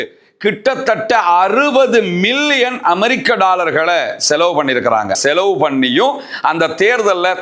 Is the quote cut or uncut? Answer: cut